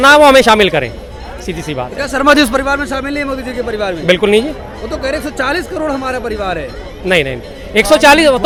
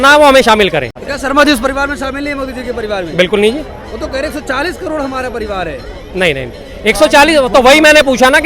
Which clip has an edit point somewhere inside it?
second; 1 cut; at 1.0 s

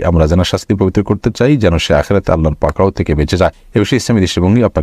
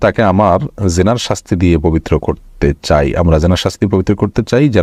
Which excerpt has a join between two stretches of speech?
first; 1 cut; at 3.6 s

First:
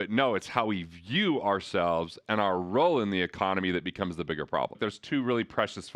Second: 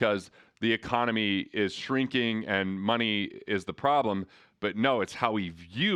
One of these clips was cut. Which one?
first; 1 cut; at 4.8 s

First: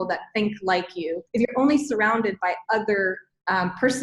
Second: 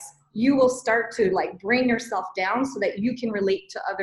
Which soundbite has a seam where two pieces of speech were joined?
first; 1 cut; at 1.2 s

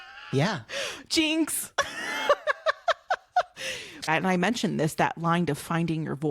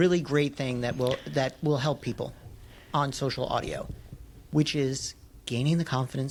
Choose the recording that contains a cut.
first; 1 cut; at 4.1 s

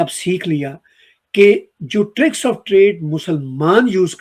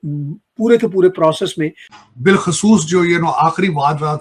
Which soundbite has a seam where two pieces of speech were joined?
second; 1 cut; at 1.9 s

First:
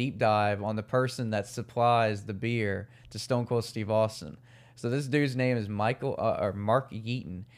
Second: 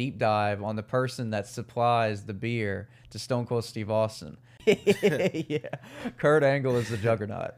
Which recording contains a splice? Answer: second; 1 cut; at 4.6 s

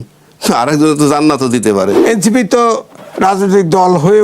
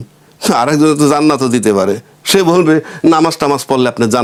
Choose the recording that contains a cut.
first; 1 cut; at 2.0 s

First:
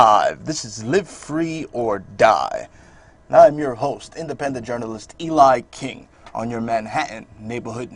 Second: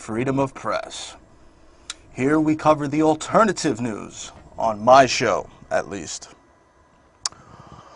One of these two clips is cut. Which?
second; 1 cut; at 2.9 s

